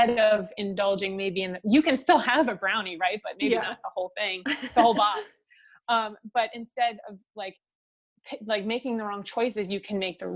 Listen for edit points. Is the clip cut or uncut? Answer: uncut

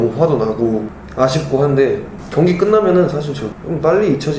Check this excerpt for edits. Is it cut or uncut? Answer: cut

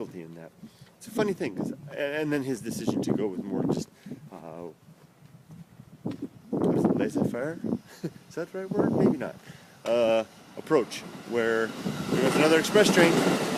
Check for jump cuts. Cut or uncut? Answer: cut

